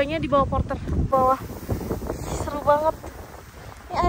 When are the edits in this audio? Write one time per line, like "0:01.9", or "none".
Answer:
0:01.1